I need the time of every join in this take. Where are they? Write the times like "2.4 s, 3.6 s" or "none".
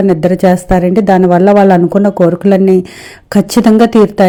none